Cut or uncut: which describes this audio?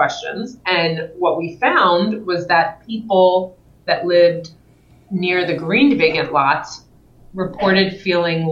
uncut